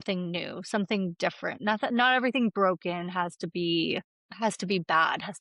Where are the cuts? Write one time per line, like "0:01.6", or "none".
0:01.6
0:04.2